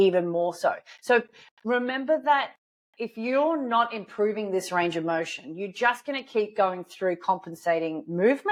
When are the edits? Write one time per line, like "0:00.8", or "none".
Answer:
none